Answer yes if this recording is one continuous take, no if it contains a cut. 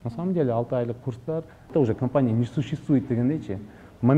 no